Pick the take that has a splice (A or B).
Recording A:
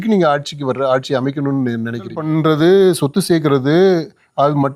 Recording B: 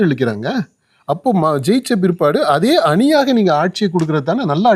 A